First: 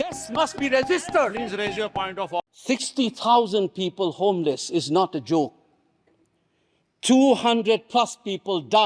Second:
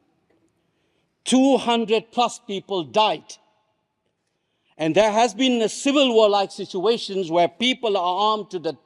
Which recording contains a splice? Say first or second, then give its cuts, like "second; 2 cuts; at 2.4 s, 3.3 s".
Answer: first; 1 cut; at 2.5 s